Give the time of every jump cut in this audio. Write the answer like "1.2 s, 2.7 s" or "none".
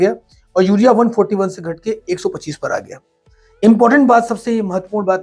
none

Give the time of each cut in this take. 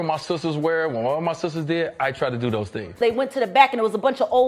3.0 s

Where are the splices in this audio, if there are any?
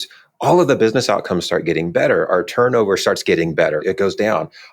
2.3 s, 3.8 s

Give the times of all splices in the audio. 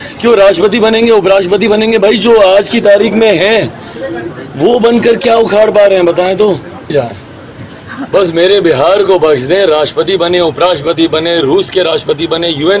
6.9 s

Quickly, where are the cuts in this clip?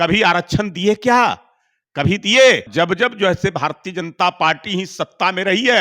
2.7 s

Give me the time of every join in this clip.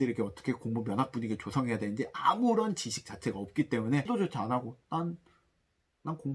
4.1 s

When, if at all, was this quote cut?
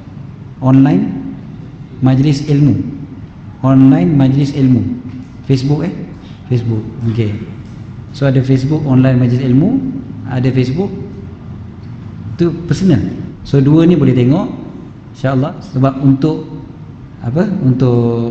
13.3 s, 15.5 s

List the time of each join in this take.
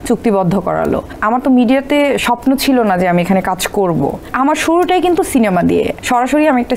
1.1 s, 4.3 s, 6.0 s

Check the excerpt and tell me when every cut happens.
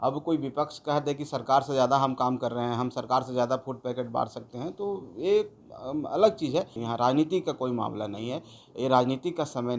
6.8 s

